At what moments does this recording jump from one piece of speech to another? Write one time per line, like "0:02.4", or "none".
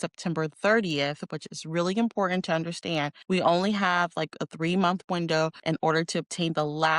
0:03.2
0:05.6